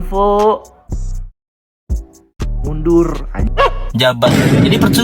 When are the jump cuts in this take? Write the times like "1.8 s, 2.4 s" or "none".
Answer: 3.8 s